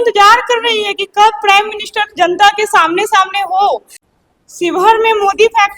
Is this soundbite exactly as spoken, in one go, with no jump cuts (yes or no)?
no